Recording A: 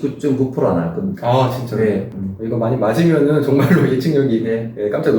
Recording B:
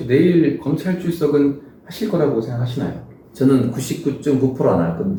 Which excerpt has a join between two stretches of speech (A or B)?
A